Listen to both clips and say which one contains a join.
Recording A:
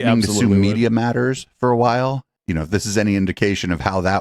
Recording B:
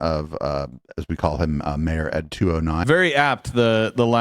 B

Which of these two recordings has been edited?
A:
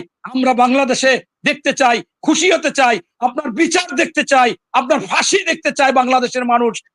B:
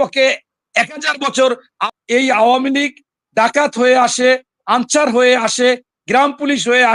B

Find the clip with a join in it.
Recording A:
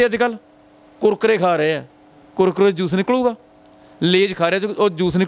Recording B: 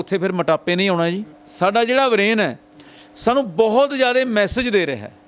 B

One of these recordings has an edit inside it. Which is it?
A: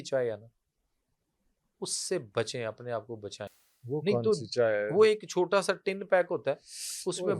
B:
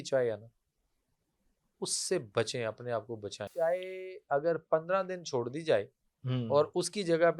B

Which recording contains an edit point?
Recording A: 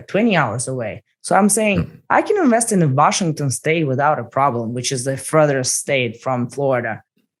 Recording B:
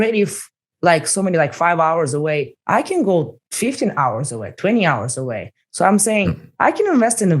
B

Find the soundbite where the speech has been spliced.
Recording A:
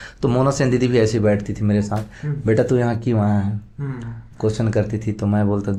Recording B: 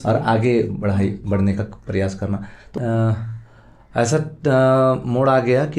B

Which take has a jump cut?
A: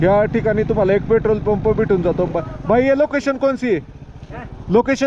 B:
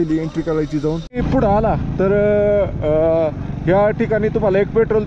B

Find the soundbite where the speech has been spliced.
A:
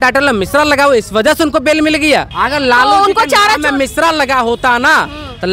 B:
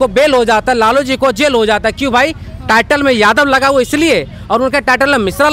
A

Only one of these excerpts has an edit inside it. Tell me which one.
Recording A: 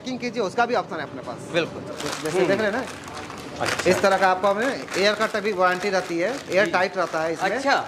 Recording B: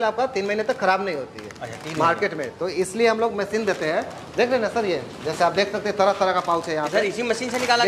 A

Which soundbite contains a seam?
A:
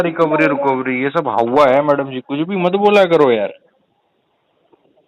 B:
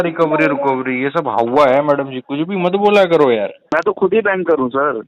B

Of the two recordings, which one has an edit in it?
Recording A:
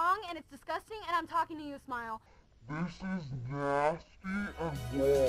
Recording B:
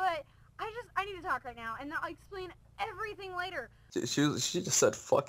B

